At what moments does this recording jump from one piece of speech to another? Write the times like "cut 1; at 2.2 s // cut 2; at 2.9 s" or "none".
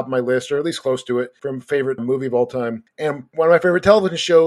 cut 1; at 1.8 s // cut 2; at 3.1 s